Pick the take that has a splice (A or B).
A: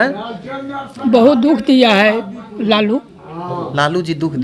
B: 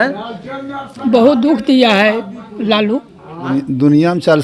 B